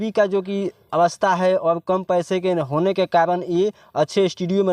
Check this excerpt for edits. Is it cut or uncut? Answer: uncut